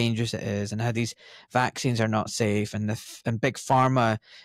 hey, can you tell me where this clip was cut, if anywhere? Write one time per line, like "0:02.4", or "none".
none